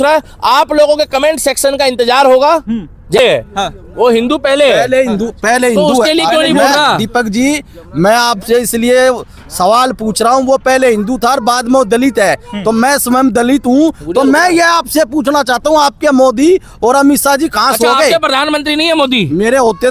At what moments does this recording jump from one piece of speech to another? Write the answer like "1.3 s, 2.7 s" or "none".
3.2 s